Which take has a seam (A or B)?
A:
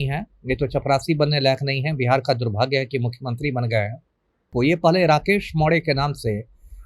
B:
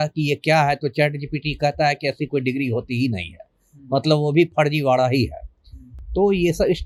A